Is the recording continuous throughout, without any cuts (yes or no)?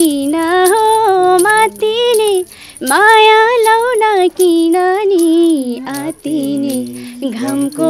yes